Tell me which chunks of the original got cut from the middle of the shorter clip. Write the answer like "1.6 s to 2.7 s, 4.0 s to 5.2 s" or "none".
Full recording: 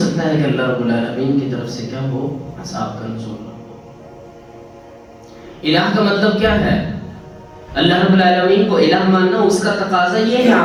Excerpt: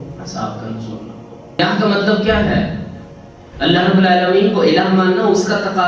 4.0 s to 5.7 s